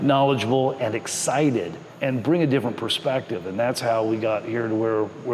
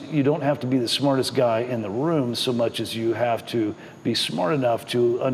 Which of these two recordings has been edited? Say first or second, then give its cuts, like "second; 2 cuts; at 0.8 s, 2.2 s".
first; 1 cut; at 1.8 s